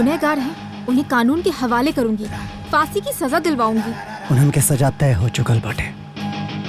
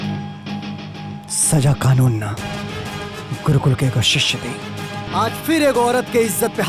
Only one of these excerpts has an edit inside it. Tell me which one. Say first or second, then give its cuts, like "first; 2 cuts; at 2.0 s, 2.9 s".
second; 1 cut; at 5.1 s